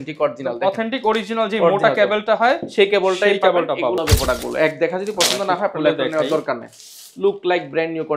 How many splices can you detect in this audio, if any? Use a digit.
1